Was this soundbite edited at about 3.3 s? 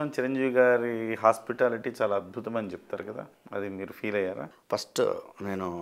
yes; 2 cuts; at 3.3 s, 4.5 s

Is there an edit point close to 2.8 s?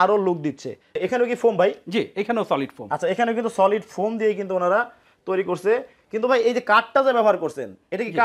no; 1 cut; at 1.0 s

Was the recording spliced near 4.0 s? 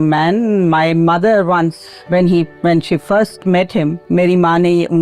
yes; 1 cut; at 4.0 s

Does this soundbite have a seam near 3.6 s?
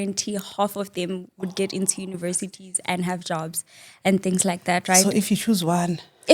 no; 0 cuts

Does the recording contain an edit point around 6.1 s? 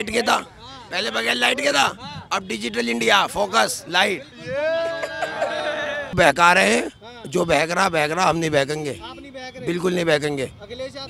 yes; 1 cut; at 6.1 s

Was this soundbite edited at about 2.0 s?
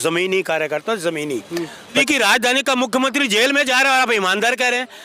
yes; 1 cut; at 2.0 s

